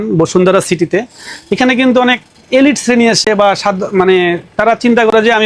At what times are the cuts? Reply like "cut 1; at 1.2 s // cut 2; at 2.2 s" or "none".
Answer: none